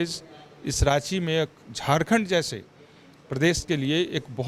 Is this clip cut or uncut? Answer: uncut